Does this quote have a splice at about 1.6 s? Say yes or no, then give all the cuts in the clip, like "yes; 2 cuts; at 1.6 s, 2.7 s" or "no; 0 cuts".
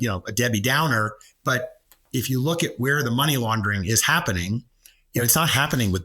yes; 1 cut; at 1.6 s